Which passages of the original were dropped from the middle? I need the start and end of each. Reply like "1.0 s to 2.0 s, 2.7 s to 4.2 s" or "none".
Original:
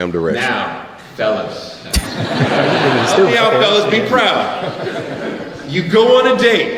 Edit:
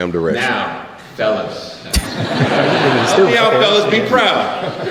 none

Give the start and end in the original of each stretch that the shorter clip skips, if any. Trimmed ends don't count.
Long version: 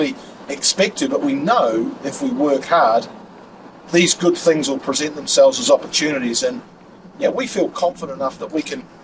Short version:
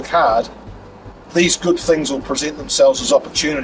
none

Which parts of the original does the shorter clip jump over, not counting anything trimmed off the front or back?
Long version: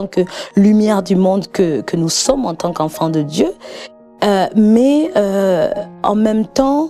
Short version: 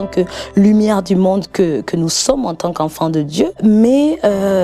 3.6 s to 4.5 s

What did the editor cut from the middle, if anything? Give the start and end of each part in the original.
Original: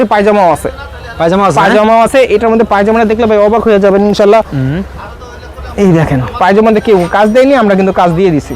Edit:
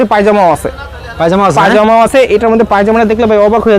none

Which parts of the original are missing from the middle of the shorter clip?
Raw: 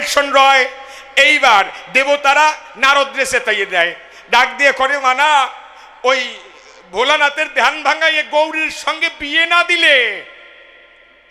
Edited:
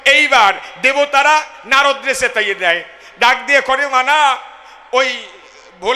none

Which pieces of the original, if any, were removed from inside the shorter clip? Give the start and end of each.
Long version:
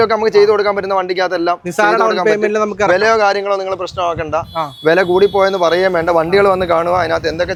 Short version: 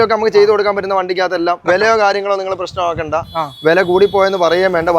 1.7 s to 2.9 s

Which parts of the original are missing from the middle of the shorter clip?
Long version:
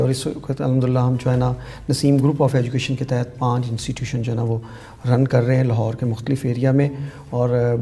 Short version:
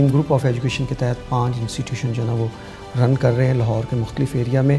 none

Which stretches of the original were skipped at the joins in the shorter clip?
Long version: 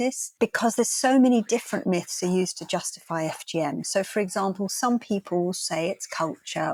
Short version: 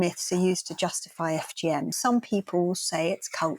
3.9 s to 4.7 s

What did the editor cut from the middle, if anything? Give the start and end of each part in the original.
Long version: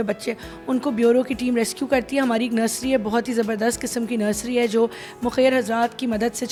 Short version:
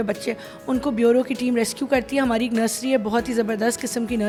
none

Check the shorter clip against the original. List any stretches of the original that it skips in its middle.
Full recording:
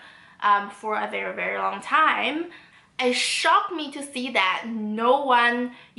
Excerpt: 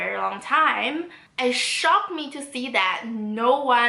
2.6 s to 2.8 s

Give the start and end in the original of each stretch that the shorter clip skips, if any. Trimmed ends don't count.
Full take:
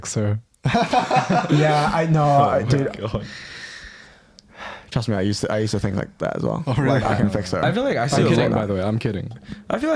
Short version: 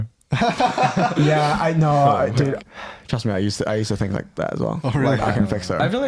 3.0 s to 4.5 s

